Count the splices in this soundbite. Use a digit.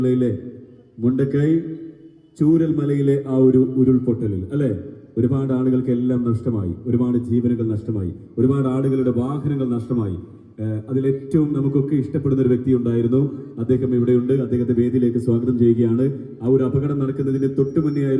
0